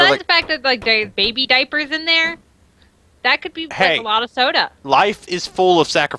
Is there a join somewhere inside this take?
no; 0 cuts

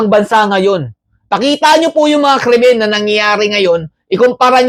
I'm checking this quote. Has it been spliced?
no; 0 cuts

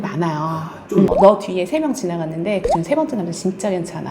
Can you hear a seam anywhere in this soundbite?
yes; 1 cut; at 1.1 s

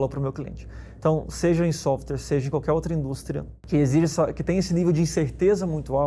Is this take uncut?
yes; 0 cuts

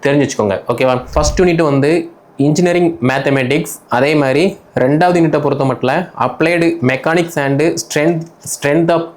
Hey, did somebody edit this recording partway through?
yes; 1 cut; at 1.1 s

